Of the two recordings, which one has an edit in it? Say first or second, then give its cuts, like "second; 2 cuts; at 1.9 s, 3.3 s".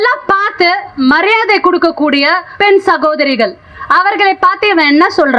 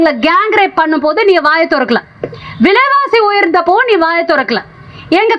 first; 2 cuts; at 0.9 s, 2.4 s